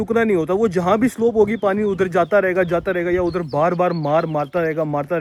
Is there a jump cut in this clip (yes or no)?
no